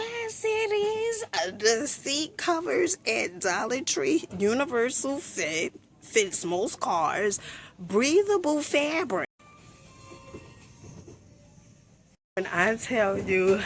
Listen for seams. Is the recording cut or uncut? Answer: cut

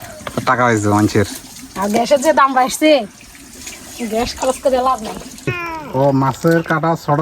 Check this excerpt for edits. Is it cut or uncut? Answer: cut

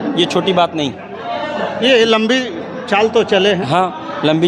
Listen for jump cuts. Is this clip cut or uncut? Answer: uncut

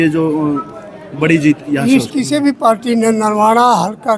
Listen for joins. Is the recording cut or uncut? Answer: cut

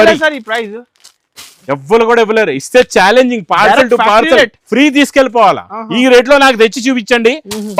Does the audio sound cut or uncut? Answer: uncut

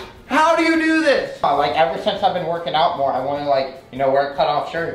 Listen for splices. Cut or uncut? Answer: cut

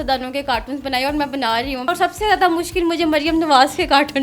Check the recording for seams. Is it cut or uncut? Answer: cut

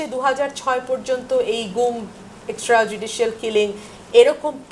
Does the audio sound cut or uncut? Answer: uncut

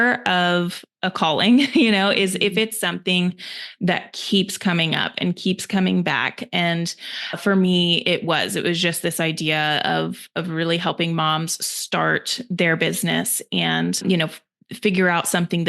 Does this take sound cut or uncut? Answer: cut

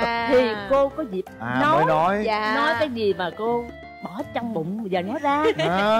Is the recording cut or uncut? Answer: uncut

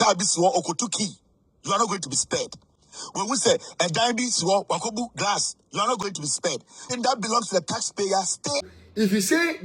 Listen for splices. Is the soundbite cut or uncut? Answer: cut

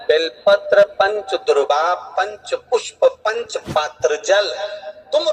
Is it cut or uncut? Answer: uncut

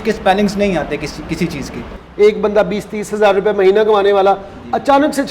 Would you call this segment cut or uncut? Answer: cut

